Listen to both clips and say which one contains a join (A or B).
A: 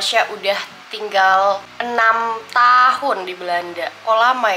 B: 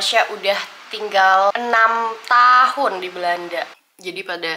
B